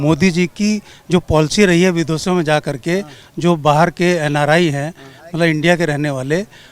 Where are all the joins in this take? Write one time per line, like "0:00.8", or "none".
none